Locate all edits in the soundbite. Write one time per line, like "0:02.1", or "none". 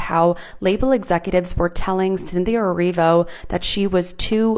none